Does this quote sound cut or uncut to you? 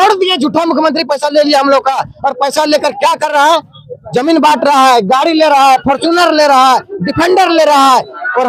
uncut